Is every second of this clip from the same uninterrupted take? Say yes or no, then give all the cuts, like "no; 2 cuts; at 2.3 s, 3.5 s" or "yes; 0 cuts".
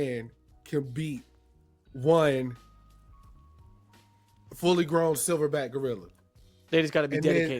yes; 0 cuts